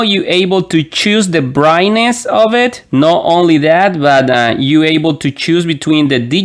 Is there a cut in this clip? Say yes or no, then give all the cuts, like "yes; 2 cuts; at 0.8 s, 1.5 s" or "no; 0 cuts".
no; 0 cuts